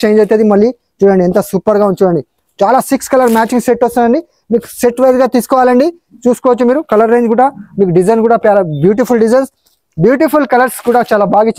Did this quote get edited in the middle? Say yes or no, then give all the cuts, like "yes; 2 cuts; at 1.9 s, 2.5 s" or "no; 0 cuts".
no; 0 cuts